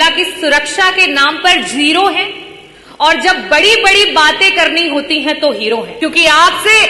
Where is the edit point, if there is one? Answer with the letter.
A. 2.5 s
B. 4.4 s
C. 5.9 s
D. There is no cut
C